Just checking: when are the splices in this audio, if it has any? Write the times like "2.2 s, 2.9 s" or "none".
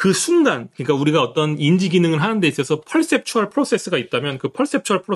none